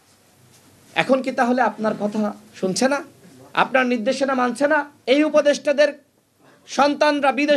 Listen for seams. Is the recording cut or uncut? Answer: cut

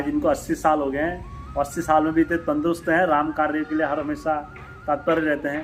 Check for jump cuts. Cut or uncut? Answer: uncut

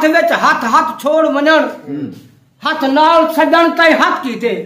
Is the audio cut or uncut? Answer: uncut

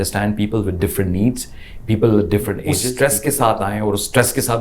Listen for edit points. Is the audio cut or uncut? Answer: cut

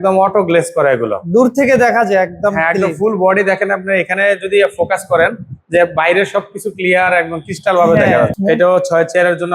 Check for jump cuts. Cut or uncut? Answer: cut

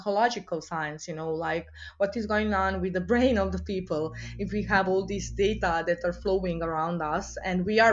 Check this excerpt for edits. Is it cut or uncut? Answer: uncut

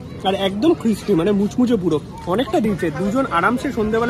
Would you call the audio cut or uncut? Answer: uncut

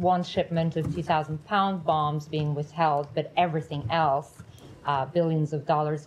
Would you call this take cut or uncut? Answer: uncut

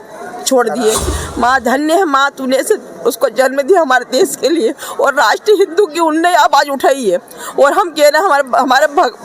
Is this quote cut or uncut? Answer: cut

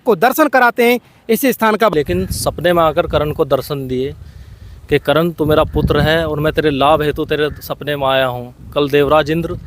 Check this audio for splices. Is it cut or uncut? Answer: cut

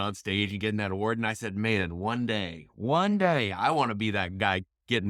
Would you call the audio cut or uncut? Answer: uncut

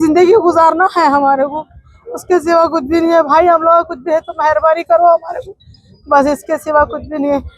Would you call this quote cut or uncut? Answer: uncut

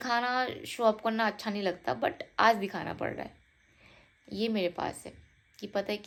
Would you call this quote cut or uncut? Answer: uncut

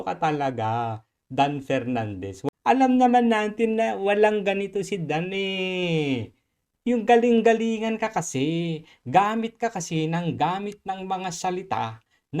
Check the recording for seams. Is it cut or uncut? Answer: cut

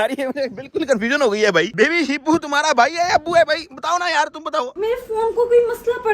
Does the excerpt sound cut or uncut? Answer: cut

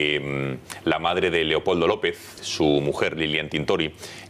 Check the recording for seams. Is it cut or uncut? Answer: uncut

